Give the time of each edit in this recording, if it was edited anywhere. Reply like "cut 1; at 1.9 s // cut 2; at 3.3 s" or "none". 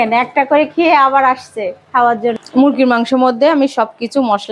cut 1; at 2.4 s